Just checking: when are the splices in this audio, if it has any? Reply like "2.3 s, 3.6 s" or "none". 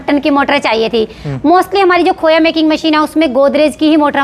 none